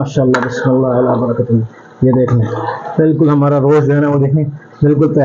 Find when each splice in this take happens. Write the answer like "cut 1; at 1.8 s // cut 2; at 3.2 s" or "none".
none